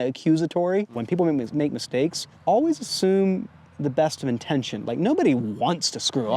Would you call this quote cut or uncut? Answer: cut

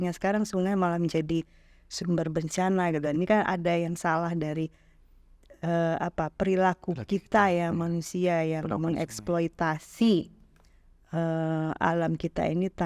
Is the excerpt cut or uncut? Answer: uncut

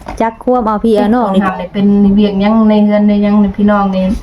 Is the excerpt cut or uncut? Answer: cut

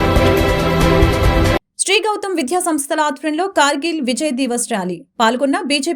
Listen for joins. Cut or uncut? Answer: uncut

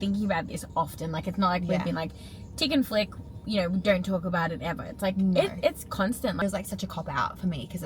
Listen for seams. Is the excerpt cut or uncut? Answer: cut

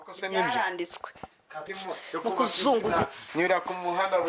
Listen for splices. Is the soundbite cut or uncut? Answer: cut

